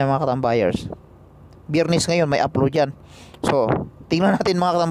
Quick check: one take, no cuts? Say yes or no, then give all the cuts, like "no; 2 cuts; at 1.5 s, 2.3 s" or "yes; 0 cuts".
yes; 0 cuts